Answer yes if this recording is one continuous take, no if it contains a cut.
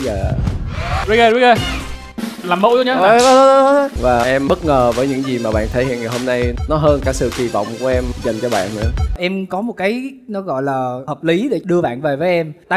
no